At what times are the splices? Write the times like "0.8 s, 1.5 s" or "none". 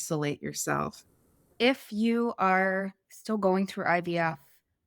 1.2 s